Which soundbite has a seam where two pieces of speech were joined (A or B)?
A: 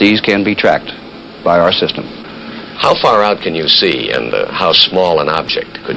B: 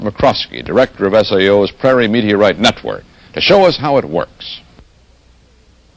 A